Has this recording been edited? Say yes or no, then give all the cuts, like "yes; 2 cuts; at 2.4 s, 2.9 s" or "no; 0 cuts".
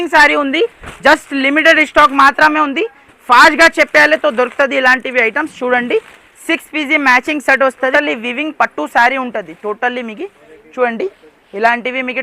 yes; 1 cut; at 7.9 s